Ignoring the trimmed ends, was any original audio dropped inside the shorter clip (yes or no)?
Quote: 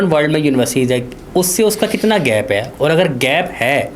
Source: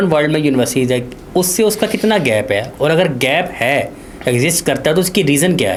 no